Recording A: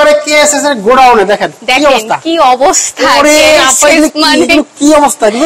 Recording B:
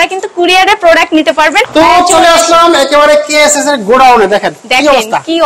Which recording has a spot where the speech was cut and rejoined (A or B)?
B